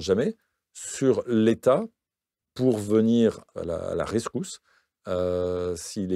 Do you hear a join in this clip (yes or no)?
no